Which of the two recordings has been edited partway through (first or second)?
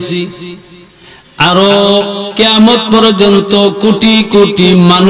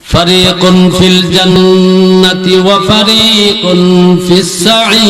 second